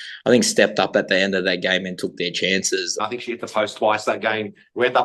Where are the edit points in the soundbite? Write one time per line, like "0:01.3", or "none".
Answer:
0:03.0

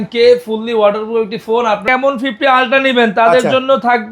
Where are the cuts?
0:01.8

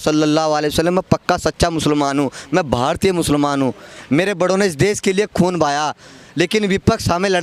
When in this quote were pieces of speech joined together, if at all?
none

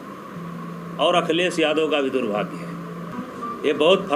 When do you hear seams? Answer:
0:03.1

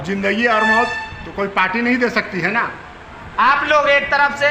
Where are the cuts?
none

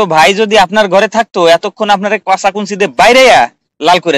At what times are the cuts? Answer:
none

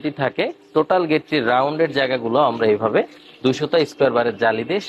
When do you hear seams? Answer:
none

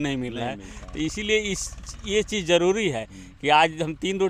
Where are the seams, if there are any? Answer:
none

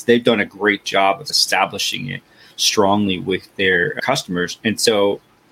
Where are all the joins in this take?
0:01.3
0:04.0

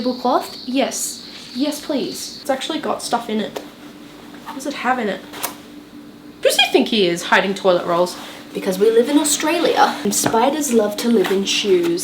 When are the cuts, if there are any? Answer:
0:02.2
0:05.4
0:08.4
0:10.0

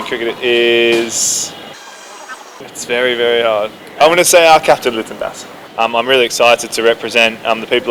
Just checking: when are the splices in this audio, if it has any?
0:02.2
0:05.6

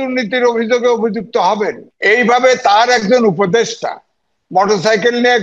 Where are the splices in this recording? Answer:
0:01.9

